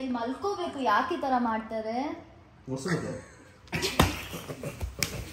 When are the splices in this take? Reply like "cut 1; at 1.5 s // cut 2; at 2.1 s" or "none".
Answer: none